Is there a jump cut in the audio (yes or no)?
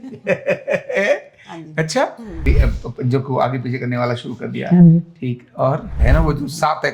yes